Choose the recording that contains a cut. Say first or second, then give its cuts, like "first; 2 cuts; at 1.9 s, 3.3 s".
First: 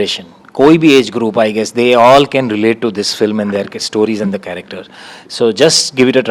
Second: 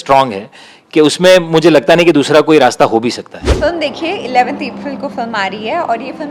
second; 1 cut; at 3.4 s